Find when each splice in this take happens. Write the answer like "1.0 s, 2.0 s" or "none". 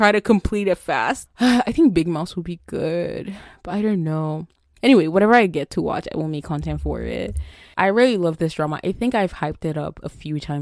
1.2 s, 7.7 s